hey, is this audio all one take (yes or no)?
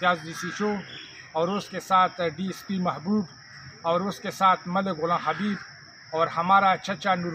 yes